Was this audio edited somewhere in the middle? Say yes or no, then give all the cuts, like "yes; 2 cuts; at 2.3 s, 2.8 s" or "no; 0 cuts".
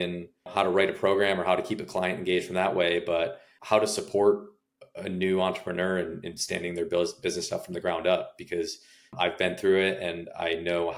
no; 0 cuts